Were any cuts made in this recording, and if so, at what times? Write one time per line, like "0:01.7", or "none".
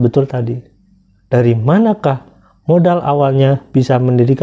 none